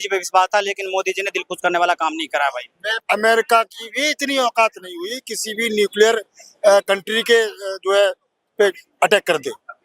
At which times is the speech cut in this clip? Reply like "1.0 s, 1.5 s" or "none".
3.0 s